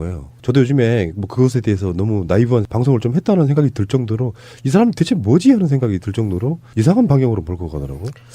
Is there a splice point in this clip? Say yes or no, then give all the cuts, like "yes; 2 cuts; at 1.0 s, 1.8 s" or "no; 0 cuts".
yes; 1 cut; at 5.6 s